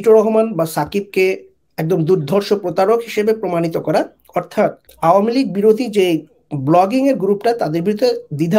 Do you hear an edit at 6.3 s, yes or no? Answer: no